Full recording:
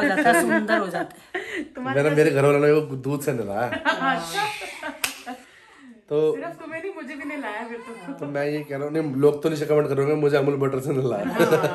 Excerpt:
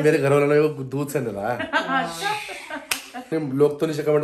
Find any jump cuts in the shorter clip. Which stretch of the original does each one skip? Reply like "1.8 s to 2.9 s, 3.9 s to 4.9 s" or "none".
5.4 s to 8.9 s